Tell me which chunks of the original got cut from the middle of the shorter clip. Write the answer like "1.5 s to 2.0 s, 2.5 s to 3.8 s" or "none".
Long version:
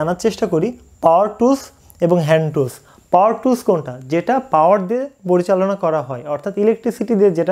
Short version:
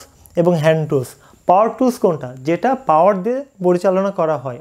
none